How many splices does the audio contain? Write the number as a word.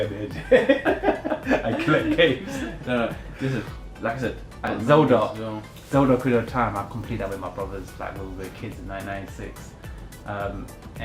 one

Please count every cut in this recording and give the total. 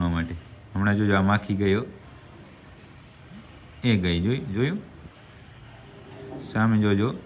zero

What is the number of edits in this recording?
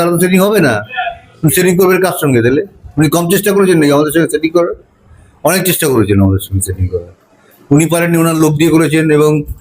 zero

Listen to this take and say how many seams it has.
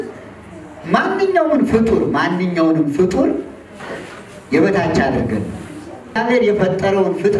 one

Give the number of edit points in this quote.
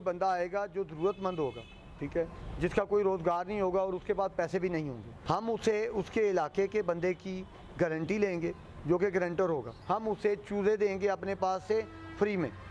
two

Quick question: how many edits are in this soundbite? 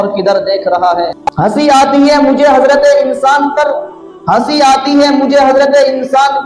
one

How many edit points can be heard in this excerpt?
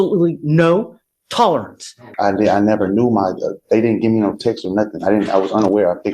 one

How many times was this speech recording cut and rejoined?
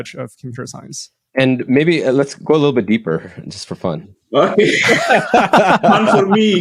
zero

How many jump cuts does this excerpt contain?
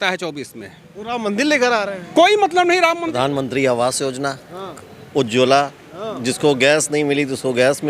one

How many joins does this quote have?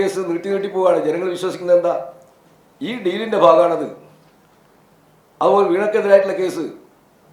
zero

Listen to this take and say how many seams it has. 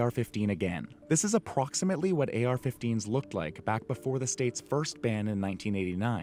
zero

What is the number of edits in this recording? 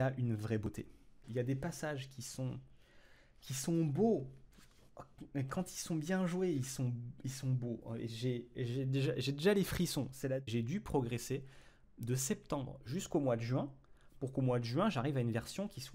two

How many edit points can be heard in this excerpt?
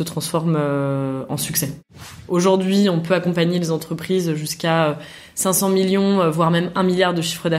one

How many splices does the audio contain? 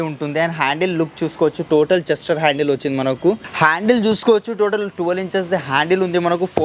one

